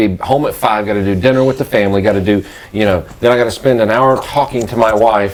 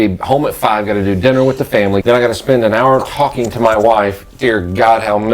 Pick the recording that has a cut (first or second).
second